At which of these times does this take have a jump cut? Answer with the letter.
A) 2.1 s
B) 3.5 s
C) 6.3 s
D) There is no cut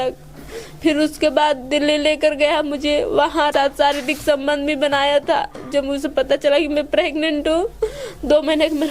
B